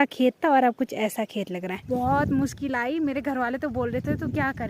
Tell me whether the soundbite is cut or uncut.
cut